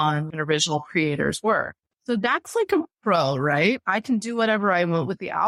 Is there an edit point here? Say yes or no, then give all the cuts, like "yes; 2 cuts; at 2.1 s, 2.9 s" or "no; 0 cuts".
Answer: no; 0 cuts